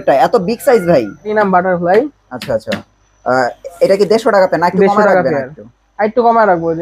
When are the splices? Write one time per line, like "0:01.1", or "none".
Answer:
0:01.3